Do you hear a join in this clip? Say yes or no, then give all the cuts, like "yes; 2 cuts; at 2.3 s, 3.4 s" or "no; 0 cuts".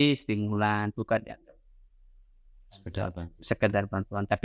no; 0 cuts